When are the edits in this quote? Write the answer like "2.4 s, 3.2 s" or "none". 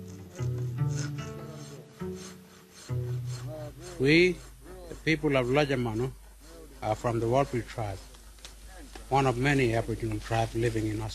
none